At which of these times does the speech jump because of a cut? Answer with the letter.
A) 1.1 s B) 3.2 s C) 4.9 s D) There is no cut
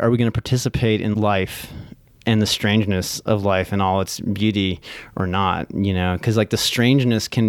A